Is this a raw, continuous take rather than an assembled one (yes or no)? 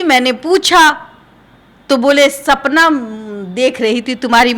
yes